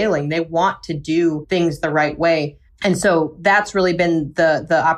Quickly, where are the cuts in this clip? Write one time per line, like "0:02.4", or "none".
none

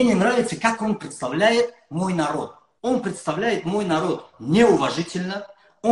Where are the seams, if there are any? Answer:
0:02.6

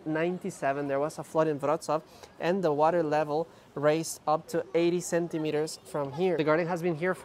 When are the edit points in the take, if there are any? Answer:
none

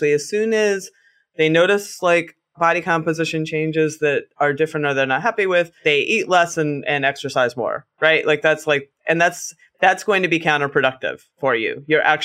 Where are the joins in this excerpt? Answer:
none

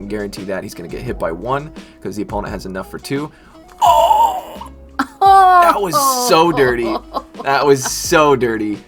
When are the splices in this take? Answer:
none

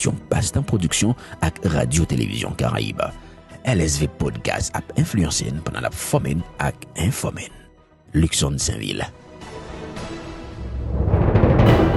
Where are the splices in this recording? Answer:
0:10.7

